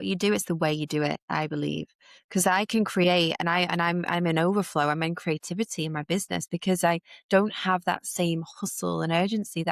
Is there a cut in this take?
no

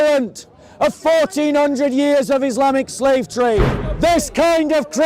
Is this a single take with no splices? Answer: no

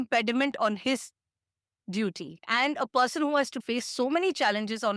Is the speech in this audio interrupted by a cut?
yes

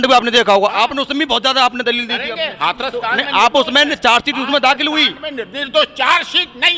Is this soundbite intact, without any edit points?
yes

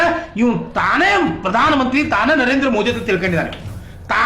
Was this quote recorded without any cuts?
no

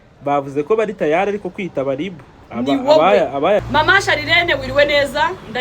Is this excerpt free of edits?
no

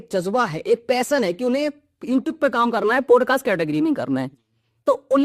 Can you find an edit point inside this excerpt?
no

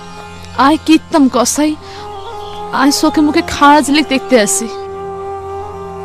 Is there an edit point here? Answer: yes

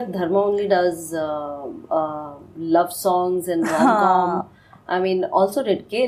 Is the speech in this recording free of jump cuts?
yes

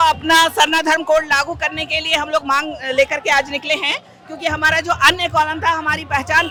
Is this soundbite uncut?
yes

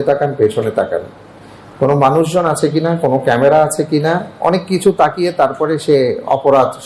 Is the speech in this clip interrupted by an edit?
no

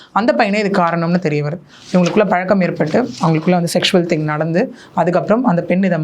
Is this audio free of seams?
yes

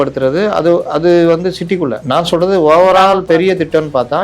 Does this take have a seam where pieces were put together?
yes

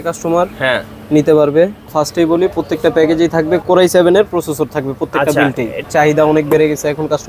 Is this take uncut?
no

